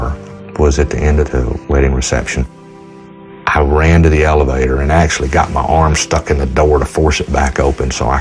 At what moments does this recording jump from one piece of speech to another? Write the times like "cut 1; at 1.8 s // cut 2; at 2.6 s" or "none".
none